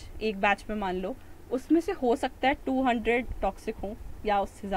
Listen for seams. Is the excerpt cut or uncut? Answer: uncut